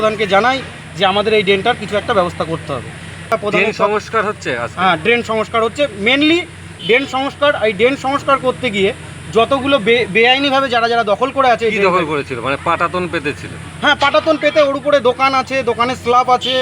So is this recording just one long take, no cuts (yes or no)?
no